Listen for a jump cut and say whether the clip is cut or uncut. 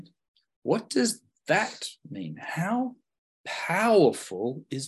uncut